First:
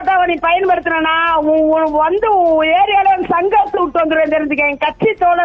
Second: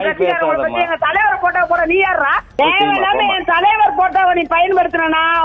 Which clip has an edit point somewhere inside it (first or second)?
second